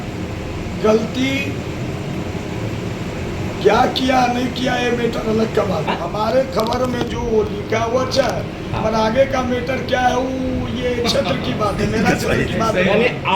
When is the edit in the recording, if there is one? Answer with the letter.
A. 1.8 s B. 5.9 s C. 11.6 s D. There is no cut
B